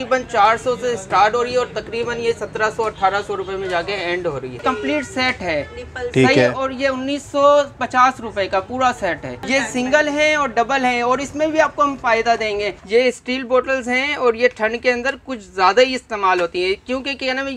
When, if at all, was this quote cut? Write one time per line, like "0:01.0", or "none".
0:04.6
0:09.3
0:12.8